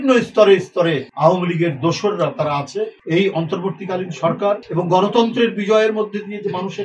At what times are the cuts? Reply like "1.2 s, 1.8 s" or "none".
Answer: 1.1 s, 3.0 s, 4.7 s